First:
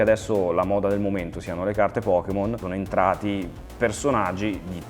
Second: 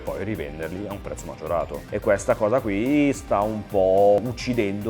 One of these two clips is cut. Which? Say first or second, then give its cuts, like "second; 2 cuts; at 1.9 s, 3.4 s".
second; 2 cuts; at 1.8 s, 4.2 s